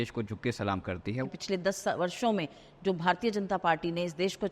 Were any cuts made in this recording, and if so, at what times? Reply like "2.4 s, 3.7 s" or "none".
1.2 s

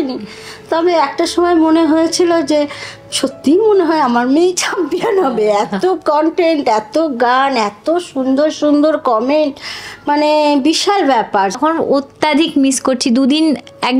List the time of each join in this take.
11.6 s

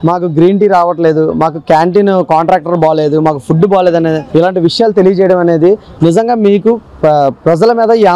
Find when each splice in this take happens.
none

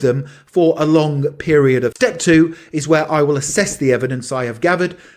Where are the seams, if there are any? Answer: 1.9 s

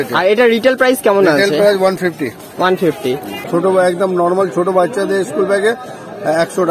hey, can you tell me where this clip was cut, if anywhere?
3.4 s

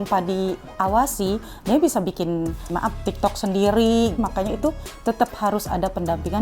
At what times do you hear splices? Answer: 2.7 s, 4.2 s

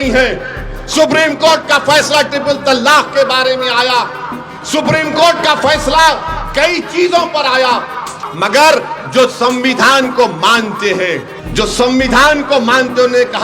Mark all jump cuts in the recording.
8.2 s, 11.4 s

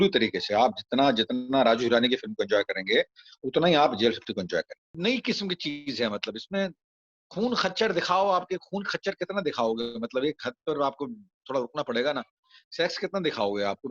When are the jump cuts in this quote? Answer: 4.9 s

